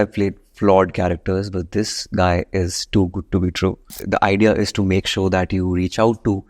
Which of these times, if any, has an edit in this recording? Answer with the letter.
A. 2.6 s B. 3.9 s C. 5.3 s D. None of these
B